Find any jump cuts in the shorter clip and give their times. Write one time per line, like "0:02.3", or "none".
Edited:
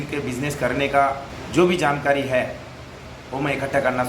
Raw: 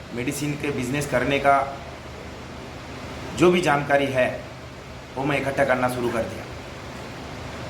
0:01.3